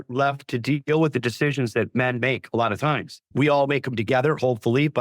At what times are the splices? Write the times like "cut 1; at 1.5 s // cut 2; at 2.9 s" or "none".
cut 1; at 3.1 s